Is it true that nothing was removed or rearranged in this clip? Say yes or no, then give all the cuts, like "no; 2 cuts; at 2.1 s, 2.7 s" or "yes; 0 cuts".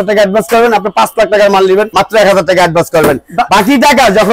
yes; 0 cuts